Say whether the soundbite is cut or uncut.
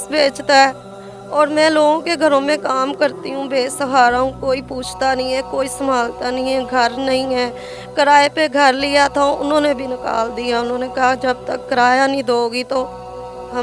uncut